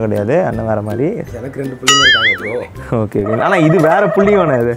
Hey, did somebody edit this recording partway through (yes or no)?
yes